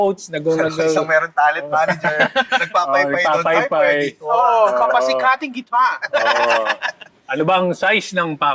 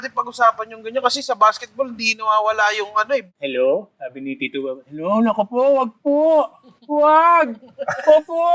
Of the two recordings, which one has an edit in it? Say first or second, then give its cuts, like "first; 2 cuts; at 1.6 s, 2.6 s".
second; 1 cut; at 3.3 s